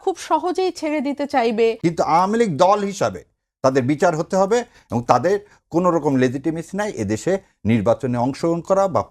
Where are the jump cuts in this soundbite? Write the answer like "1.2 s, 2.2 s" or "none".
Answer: 1.8 s